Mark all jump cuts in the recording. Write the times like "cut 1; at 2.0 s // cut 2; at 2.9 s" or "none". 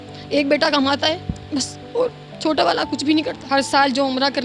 cut 1; at 3.4 s